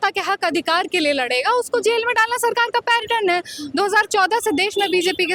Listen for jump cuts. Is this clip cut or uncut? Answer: uncut